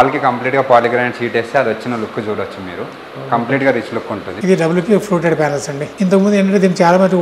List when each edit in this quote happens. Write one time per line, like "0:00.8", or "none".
0:04.3
0:05.8